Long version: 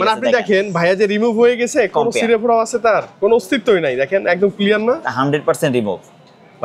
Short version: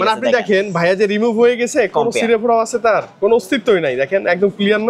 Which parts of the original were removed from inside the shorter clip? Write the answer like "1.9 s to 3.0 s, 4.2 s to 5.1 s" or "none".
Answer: none